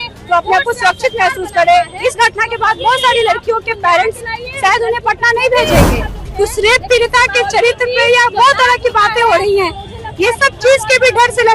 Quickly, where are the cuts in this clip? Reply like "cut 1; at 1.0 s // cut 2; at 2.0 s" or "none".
cut 1; at 6.2 s